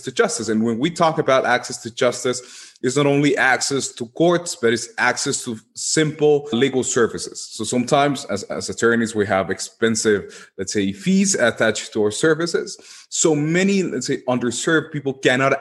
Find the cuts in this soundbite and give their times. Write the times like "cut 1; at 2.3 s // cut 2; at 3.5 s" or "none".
none